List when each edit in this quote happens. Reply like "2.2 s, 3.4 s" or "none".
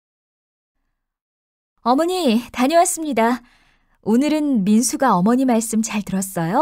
4.3 s